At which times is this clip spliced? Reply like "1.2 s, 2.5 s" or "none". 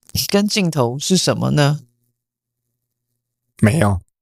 none